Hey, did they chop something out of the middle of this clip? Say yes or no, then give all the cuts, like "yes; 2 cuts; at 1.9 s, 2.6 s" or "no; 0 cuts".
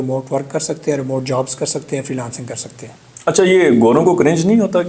no; 0 cuts